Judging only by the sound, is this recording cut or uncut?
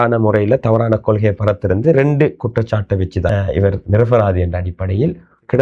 cut